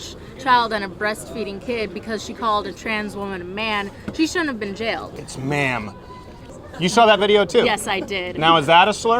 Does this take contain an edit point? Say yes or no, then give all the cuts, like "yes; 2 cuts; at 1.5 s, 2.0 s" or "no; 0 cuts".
yes; 2 cuts; at 5.1 s, 6.5 s